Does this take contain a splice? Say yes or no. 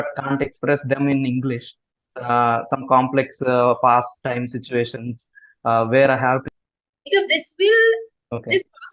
yes